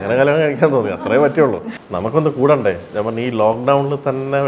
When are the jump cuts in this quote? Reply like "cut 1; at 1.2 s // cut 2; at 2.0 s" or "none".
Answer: cut 1; at 1.7 s